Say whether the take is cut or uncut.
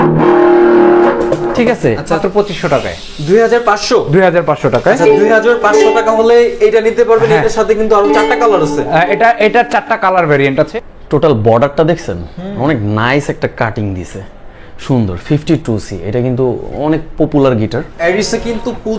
cut